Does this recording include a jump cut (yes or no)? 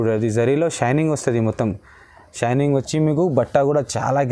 no